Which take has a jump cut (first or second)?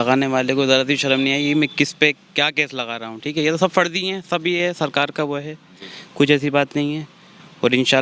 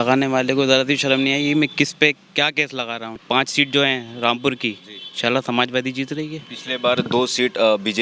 second